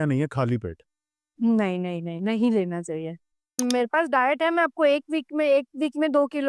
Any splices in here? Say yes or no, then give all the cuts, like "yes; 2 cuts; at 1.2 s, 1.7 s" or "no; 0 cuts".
yes; 1 cut; at 3.6 s